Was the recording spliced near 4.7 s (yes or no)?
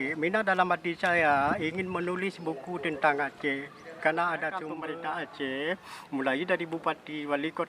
yes